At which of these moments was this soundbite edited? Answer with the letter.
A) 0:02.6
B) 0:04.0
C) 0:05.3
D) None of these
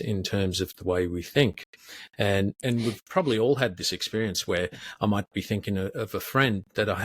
A